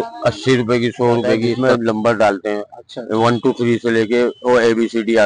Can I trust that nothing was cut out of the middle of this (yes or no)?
no